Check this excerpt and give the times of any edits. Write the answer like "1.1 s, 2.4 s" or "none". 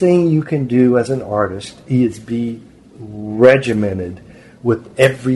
none